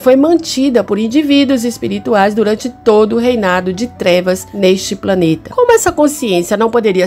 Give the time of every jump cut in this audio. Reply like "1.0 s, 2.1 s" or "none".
4.5 s, 5.5 s